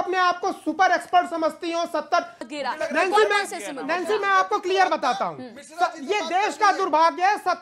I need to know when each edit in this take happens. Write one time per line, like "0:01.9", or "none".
0:02.5